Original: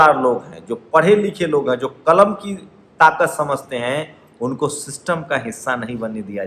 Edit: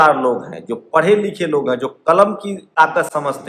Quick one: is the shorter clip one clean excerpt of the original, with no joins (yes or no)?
no